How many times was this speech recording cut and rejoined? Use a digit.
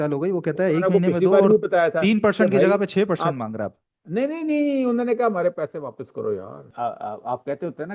1